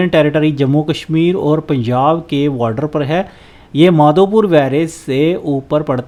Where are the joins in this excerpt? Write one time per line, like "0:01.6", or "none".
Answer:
none

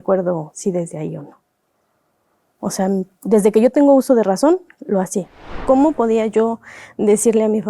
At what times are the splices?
0:05.6

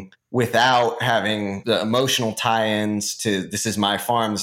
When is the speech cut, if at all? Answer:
0:01.6

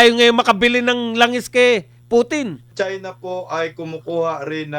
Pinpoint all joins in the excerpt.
0:02.6

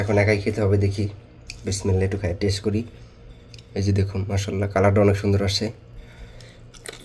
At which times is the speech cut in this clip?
none

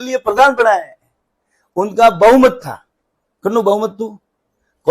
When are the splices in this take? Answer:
none

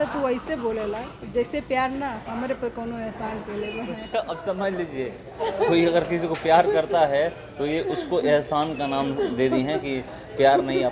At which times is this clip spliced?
0:04.0

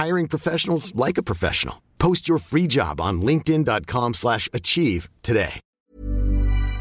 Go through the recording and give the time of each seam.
0:05.8

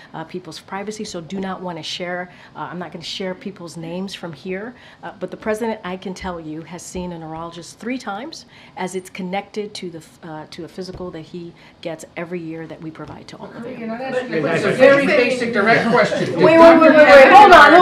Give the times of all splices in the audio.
none

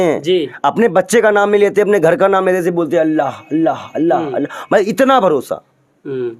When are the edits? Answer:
none

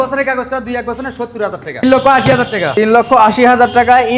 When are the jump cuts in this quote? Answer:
0:01.8
0:02.7

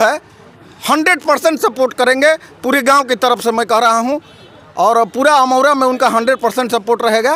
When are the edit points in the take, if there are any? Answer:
none

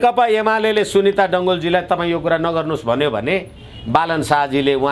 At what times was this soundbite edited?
none

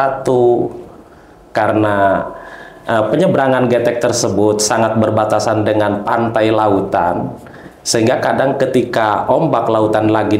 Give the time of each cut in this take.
none

